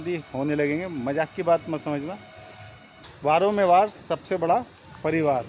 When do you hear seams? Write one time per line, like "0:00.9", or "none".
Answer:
0:03.0